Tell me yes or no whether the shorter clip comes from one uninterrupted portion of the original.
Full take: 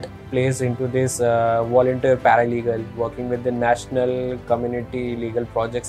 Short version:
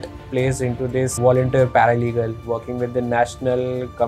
no